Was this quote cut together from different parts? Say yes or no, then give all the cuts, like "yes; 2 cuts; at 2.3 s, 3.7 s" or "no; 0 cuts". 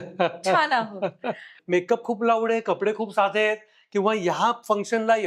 yes; 1 cut; at 1.5 s